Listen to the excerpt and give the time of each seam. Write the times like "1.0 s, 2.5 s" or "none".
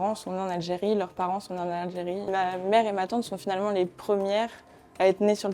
2.3 s